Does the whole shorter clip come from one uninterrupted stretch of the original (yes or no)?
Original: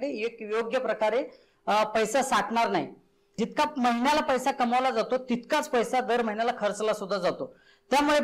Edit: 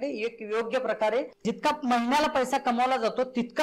no